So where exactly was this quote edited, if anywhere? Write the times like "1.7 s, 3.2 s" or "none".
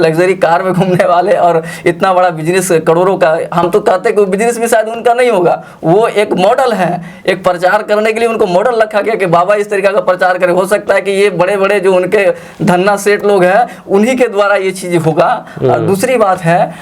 none